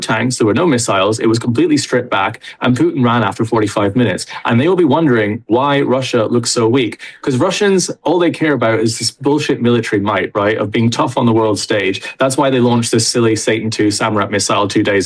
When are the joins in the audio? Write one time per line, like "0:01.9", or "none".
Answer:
none